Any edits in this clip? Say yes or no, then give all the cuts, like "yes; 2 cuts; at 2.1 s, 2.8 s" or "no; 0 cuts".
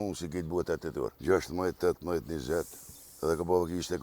yes; 1 cut; at 1.2 s